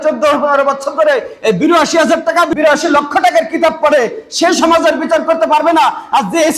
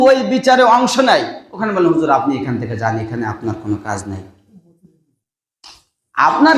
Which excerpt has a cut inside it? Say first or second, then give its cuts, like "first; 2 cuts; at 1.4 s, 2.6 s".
first; 1 cut; at 2.5 s